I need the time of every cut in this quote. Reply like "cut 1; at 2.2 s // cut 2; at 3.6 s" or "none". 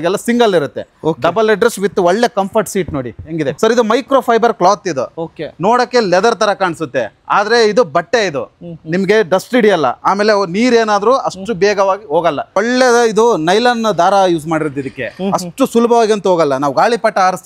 cut 1; at 3.5 s // cut 2; at 12.6 s